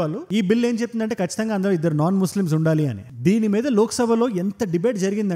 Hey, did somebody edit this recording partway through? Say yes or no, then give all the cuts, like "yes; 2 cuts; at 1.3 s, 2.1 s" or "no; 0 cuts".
yes; 1 cut; at 3.0 s